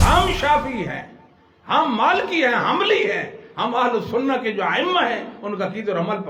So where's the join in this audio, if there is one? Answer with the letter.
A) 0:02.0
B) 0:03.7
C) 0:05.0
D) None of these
D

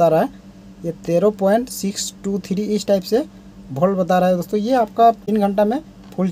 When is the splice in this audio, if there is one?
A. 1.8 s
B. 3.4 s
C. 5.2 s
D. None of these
C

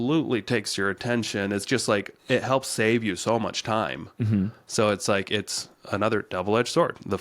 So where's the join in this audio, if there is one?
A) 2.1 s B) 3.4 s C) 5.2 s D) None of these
A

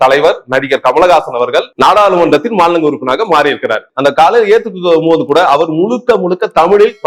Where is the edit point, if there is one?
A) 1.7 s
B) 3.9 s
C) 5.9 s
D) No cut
B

